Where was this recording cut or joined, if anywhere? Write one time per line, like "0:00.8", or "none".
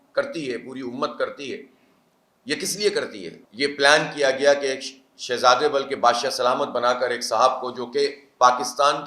0:03.4